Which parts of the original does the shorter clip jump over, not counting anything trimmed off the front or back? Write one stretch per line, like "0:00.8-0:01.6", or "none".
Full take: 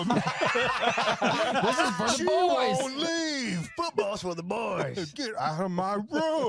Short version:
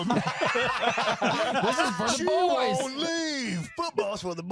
none